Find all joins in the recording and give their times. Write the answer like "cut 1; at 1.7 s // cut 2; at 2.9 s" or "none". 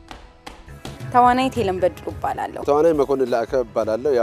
cut 1; at 2.5 s